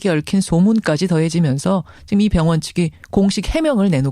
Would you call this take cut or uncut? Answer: cut